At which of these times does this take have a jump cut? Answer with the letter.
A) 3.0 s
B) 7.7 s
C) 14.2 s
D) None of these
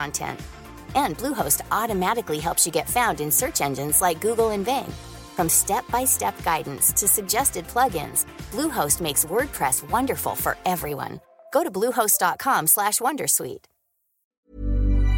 C